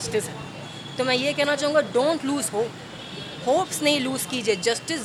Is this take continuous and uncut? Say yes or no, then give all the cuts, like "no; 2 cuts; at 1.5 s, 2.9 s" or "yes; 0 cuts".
yes; 0 cuts